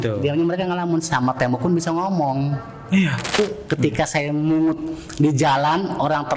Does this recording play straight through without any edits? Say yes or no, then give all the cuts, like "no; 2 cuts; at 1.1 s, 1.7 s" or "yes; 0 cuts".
no; 1 cut; at 3.3 s